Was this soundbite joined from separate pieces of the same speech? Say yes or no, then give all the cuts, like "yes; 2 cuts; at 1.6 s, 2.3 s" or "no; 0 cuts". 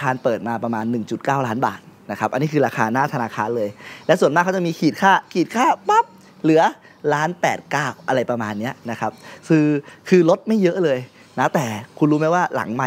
no; 0 cuts